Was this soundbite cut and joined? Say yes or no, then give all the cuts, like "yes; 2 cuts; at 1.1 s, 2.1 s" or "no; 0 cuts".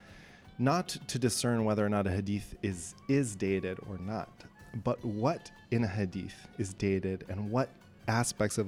no; 0 cuts